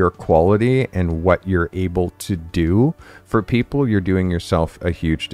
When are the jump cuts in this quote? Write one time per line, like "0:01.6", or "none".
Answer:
none